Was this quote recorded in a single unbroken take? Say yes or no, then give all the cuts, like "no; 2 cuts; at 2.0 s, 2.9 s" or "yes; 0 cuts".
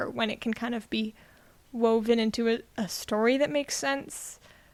yes; 0 cuts